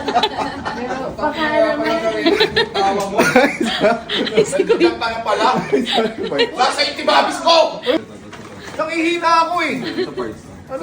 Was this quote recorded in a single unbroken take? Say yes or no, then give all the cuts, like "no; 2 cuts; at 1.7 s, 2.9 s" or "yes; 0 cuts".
no; 1 cut; at 8.0 s